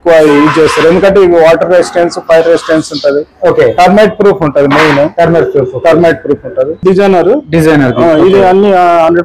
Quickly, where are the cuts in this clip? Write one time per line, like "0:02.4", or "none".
0:06.8